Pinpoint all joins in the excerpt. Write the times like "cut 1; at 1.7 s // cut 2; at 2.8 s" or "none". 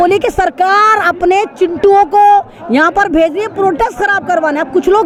none